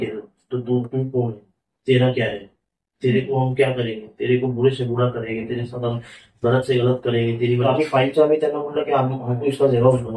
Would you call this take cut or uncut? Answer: cut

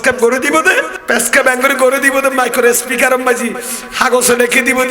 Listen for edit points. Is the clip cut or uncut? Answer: cut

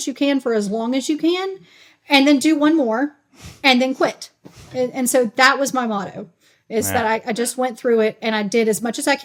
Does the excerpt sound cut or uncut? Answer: uncut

